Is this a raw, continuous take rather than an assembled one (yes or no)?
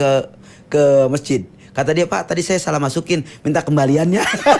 yes